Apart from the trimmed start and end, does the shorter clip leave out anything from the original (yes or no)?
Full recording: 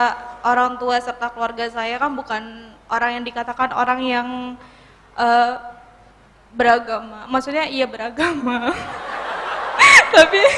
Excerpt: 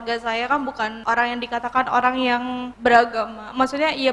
yes